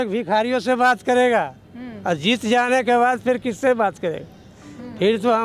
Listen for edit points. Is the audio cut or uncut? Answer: uncut